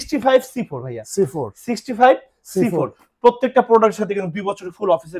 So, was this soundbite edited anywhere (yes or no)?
no